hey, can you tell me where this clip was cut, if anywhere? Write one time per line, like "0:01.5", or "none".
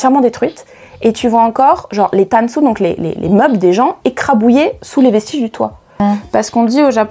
0:06.0

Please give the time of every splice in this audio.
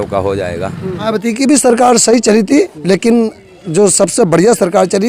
0:01.1

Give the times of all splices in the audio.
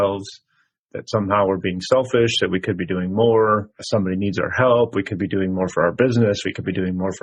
none

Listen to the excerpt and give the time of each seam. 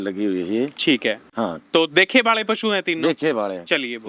none

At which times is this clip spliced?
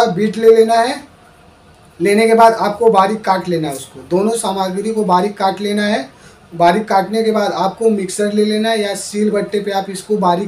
none

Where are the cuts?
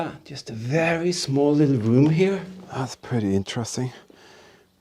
0:02.6

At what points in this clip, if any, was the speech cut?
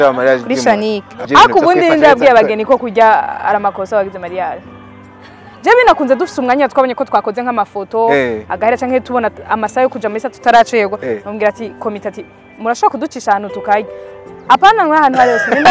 0:01.2

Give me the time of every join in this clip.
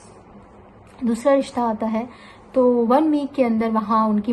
none

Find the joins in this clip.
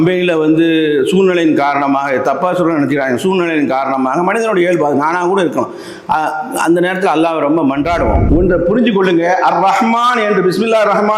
0:08.2

